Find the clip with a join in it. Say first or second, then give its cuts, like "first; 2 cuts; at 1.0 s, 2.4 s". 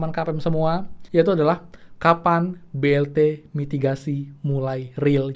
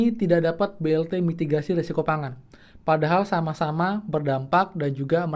first; 1 cut; at 0.9 s